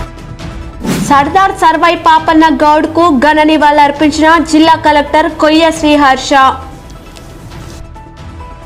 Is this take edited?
yes; 1 cut; at 0.9 s

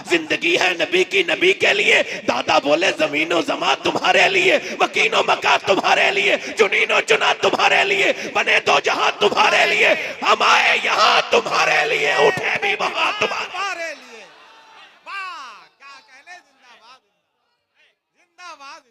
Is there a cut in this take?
no; 0 cuts

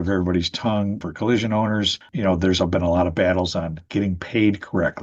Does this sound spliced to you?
yes; 2 cuts; at 1.0 s, 2.0 s

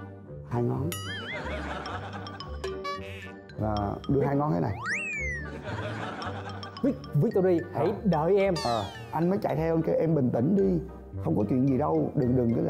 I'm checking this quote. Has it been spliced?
yes; 1 cut; at 9.0 s

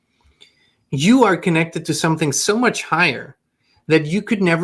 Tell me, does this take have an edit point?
no; 0 cuts

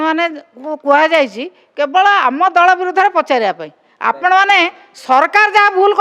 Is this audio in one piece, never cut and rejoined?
yes; 0 cuts

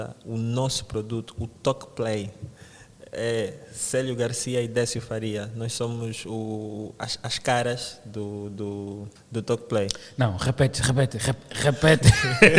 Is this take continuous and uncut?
yes; 0 cuts

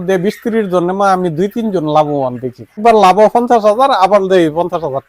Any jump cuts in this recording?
yes; 1 cut; at 2.8 s

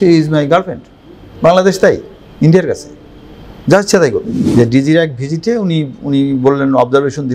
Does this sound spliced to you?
yes; 1 cut; at 4.4 s

